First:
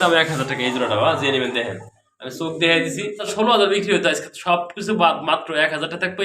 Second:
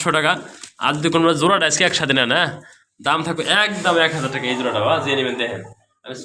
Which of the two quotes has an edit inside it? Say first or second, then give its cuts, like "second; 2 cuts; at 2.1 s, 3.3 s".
first; 1 cut; at 3.3 s